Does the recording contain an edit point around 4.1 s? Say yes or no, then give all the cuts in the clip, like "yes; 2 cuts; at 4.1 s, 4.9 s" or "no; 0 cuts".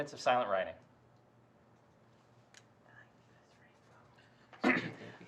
no; 1 cut; at 2.6 s